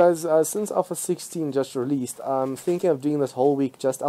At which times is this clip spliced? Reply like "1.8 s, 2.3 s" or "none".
none